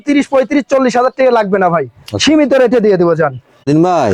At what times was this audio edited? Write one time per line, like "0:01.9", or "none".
none